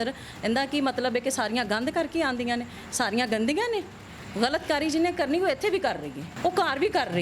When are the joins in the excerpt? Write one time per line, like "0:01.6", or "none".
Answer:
0:04.1
0:06.2